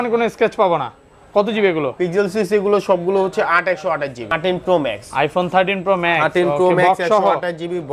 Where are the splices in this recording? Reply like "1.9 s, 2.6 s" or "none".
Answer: 4.3 s